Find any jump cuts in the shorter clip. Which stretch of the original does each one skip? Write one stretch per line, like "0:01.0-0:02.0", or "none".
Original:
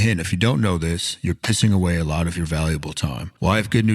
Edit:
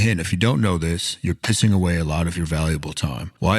none